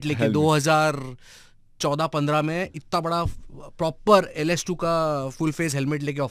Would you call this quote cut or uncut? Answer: uncut